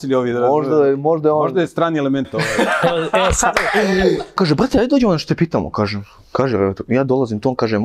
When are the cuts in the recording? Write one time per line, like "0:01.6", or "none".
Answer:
0:04.4